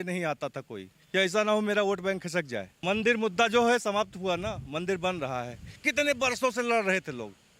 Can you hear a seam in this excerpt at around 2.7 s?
yes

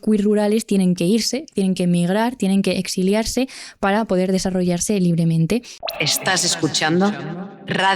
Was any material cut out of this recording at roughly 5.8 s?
yes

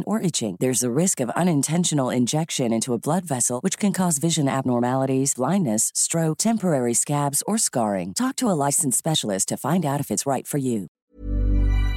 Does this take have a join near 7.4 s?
no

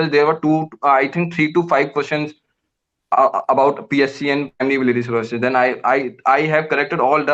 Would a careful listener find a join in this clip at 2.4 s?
no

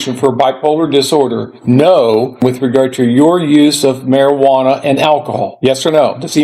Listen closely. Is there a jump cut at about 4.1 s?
no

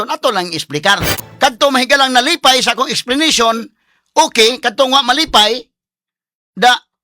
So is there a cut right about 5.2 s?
no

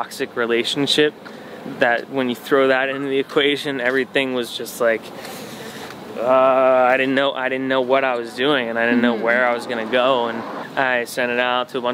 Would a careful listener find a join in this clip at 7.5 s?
no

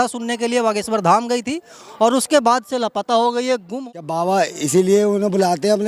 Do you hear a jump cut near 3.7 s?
yes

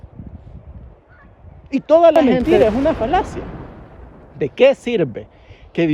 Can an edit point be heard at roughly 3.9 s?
no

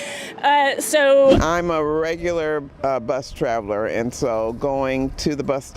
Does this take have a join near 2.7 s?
no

